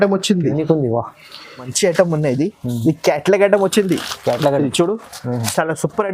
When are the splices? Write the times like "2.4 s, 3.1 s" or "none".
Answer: 1.7 s